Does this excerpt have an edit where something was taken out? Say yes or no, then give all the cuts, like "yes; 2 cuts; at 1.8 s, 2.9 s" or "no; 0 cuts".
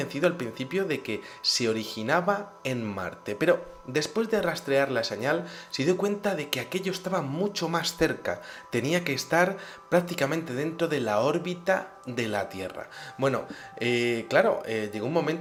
no; 0 cuts